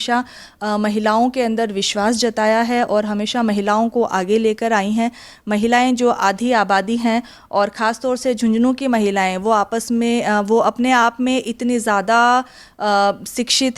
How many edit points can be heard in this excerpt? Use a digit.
0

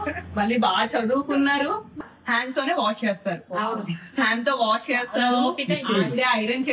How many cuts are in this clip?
1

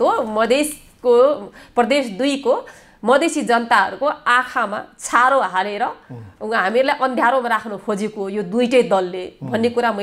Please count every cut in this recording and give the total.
0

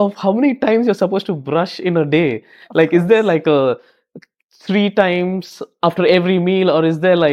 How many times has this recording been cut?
0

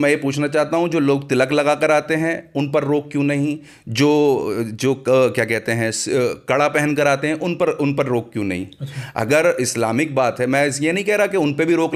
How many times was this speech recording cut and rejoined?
0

